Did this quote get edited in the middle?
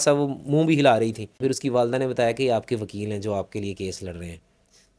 yes; 1 cut; at 1.3 s

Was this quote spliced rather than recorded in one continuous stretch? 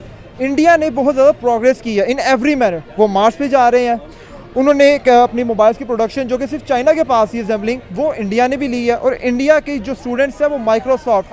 no; 0 cuts

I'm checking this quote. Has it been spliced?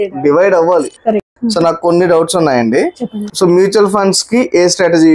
yes; 2 cuts; at 1.2 s, 3.2 s

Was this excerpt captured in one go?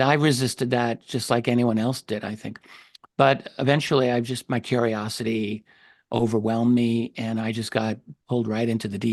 yes; 0 cuts

